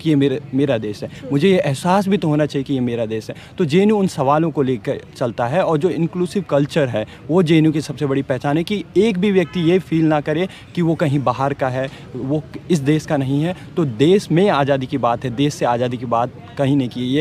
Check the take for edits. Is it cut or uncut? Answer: uncut